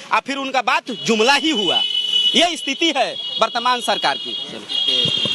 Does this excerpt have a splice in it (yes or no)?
no